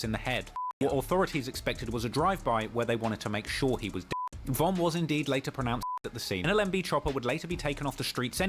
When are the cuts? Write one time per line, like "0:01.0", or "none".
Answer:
0:06.4